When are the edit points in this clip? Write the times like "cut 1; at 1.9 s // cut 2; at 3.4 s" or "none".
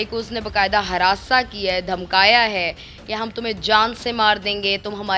none

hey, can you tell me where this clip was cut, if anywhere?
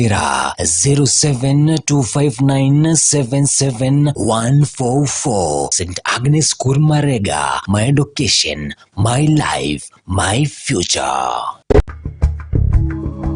cut 1; at 11.8 s

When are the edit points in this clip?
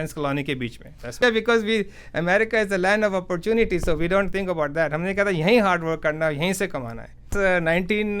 cut 1; at 1.2 s // cut 2; at 7.3 s

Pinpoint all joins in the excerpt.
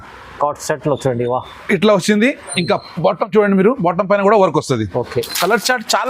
none

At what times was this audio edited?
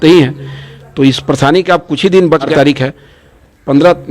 cut 1; at 2.5 s

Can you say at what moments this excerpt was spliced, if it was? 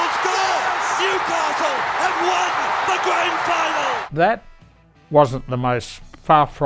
cut 1; at 4.0 s

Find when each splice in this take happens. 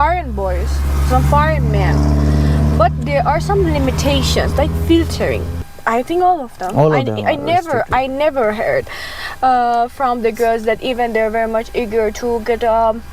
none

